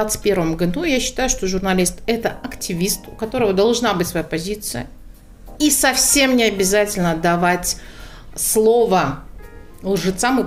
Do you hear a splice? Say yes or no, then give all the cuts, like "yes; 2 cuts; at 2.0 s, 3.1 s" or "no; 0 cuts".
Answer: no; 0 cuts